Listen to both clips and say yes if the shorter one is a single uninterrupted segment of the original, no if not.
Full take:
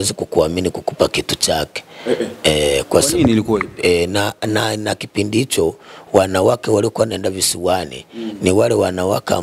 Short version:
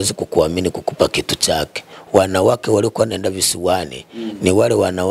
no